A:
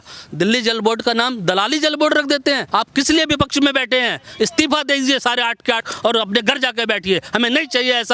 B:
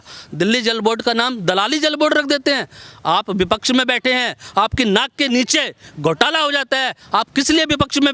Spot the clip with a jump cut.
A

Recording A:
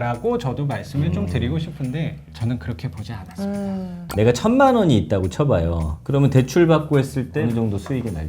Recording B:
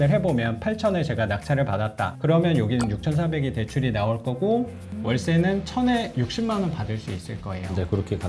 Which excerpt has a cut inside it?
A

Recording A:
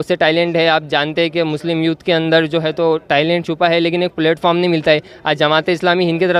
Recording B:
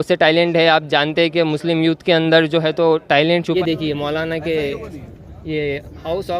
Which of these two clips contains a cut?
B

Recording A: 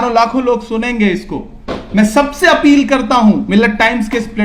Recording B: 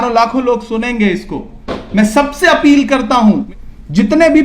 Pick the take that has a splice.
B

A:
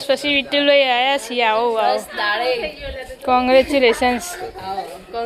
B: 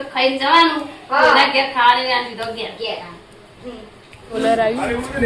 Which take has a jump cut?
B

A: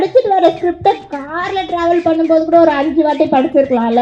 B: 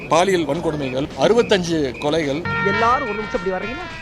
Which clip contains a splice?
B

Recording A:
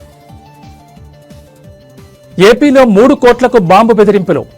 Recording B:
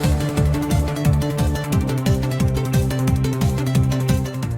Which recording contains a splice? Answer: A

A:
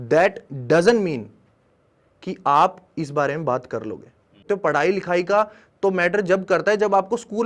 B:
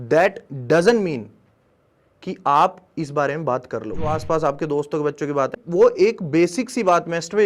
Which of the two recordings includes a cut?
B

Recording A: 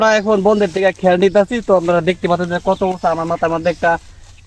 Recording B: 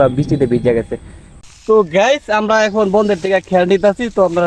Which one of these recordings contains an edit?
B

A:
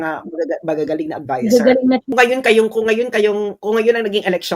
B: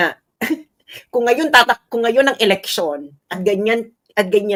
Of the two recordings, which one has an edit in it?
A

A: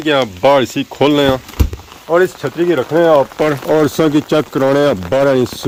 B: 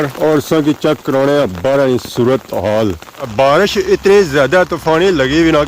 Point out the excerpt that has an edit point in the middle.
B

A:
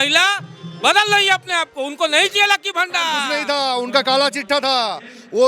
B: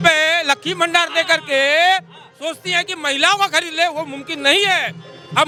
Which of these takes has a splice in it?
A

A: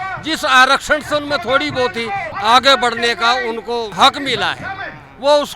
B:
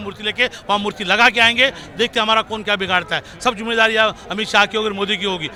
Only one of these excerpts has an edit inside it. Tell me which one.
A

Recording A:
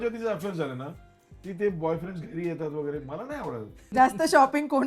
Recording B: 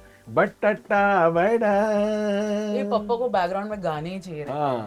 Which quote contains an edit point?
A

